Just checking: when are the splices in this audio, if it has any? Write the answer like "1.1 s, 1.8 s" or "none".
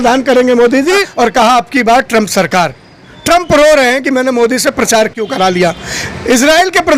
1.1 s